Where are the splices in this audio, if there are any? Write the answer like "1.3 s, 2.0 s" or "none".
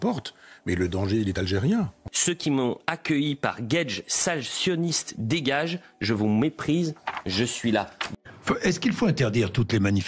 2.0 s, 8.1 s